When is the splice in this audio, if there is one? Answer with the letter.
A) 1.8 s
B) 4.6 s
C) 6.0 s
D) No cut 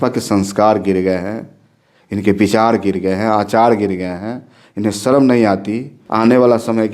C